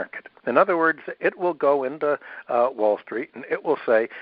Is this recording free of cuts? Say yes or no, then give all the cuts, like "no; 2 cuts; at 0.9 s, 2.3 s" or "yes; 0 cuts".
yes; 0 cuts